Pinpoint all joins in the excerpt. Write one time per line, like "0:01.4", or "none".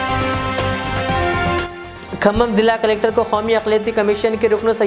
0:01.6